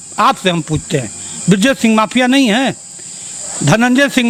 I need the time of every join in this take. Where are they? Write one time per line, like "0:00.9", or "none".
none